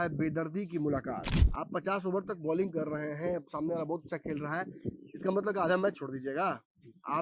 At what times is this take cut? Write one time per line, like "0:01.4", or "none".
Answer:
0:01.4

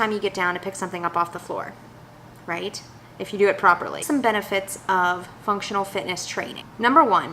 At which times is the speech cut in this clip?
0:04.0

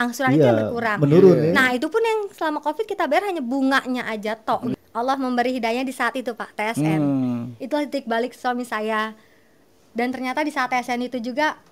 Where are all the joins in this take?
0:04.7

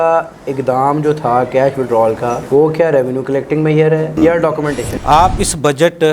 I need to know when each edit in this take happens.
0:05.0

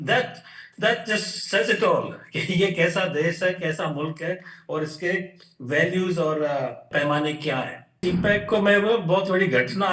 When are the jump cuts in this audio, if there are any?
0:06.9
0:08.0

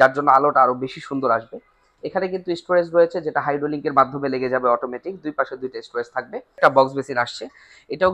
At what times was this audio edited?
0:06.6

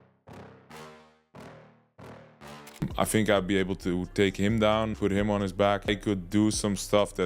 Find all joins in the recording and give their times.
0:02.8

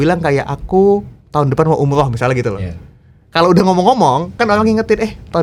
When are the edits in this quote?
none

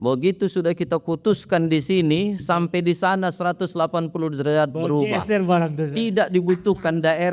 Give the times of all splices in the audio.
none

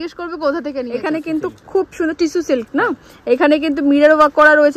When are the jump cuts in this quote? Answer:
0:00.9

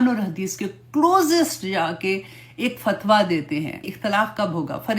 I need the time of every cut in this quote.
0:03.9

